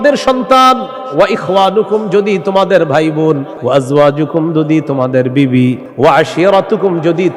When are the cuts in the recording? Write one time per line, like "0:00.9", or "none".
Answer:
0:03.5
0:05.9